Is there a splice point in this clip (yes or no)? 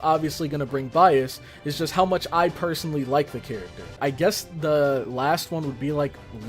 yes